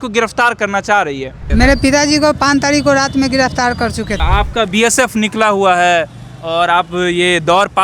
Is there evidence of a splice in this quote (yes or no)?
yes